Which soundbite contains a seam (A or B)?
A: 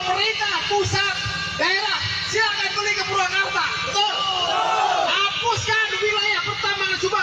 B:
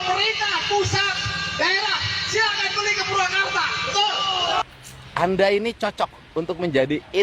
B